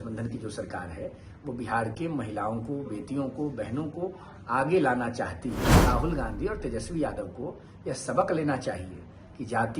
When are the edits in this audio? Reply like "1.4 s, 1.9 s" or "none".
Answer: 5.7 s